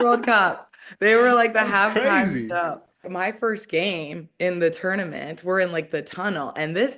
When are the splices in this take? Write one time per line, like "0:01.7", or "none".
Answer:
0:03.1